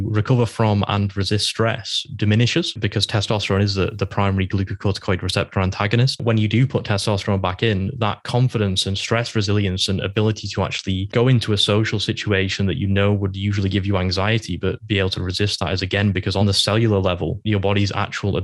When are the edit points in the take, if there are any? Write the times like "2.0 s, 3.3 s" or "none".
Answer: none